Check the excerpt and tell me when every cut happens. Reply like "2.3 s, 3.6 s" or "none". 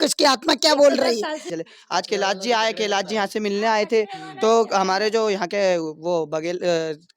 1.5 s